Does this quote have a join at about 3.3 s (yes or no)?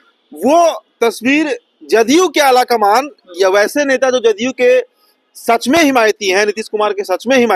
no